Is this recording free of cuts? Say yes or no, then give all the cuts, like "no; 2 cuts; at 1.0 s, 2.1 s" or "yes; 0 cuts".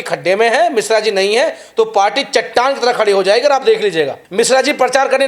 no; 1 cut; at 4.2 s